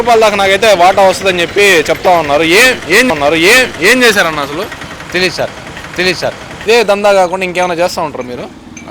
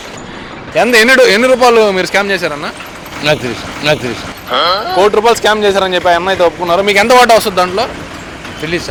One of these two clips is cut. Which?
first; 1 cut; at 6.4 s

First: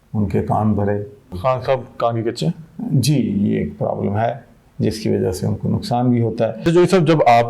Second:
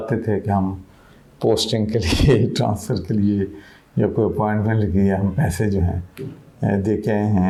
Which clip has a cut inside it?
first; 2 cuts; at 1.3 s, 6.6 s

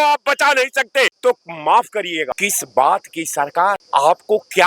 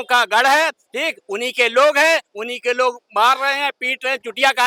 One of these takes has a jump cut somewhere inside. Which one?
first; 3 cuts; at 1.1 s, 2.3 s, 3.8 s

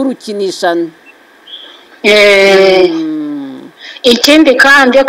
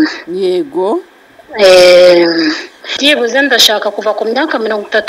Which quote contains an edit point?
second; 1 cut; at 2.8 s

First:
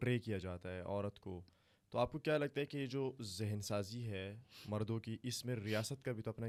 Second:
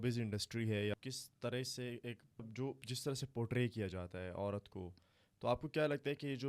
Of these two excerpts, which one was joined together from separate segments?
second; 2 cuts; at 1.0 s, 2.5 s

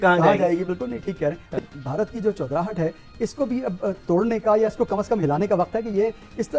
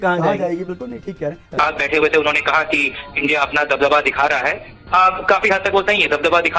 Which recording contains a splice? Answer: second; 1 cut; at 1.5 s

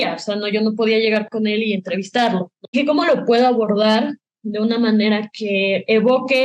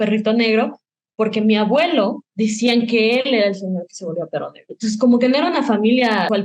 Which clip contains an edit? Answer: first; 1 cut; at 2.8 s

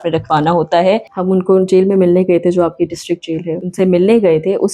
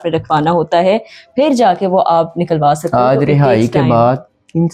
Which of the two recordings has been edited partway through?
first; 2 cuts; at 1.1 s, 3.6 s

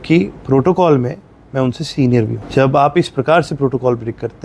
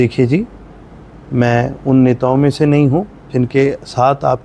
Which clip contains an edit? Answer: first; 1 cut; at 2.4 s

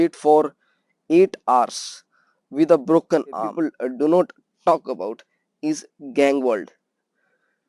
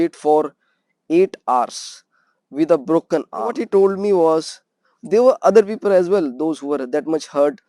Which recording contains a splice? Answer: first; 1 cut; at 3.5 s

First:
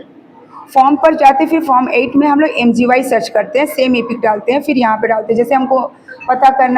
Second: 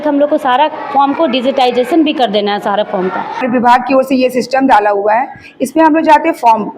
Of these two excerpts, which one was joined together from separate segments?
second; 1 cut; at 3.3 s

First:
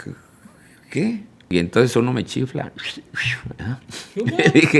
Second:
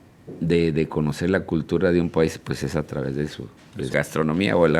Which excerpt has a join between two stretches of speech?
first; 1 cut; at 1.3 s

